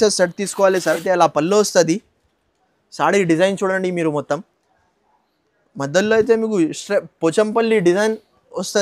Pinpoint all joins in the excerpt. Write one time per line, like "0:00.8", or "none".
0:01.0